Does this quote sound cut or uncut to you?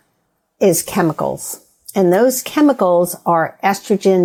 uncut